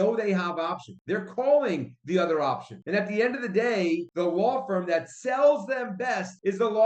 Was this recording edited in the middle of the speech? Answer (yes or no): no